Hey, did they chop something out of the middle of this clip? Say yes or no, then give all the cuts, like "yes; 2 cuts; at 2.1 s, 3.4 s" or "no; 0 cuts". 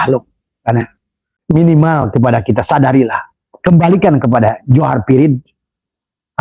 yes; 1 cut; at 1.4 s